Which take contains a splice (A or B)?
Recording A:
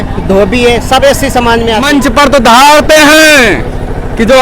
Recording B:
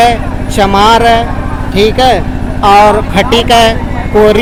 A